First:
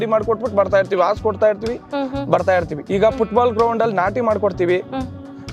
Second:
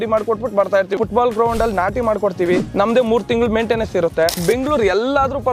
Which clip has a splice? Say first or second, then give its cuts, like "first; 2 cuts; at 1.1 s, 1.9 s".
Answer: second; 3 cuts; at 0.9 s, 2.7 s, 4.4 s